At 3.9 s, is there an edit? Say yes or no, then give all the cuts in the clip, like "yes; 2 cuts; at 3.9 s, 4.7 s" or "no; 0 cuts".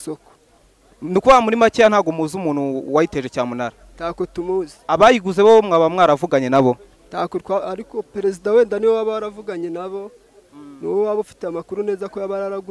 no; 0 cuts